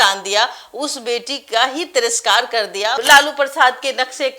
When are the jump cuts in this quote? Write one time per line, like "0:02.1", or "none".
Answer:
0:02.9